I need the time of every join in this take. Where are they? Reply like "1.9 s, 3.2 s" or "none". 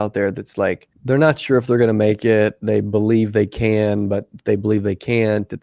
0.9 s